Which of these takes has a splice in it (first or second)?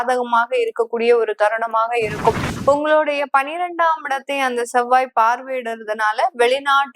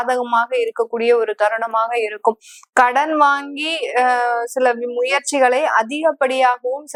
first